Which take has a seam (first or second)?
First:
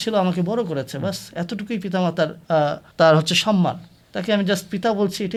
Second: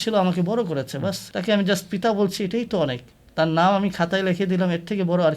second